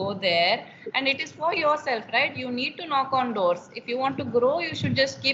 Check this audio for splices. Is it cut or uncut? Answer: uncut